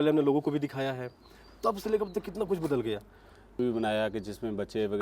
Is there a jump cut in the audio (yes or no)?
yes